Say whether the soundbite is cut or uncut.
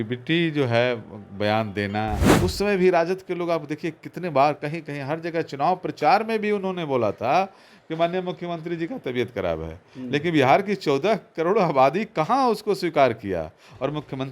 cut